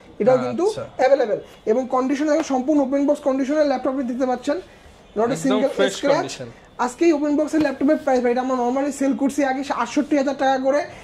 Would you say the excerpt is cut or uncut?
uncut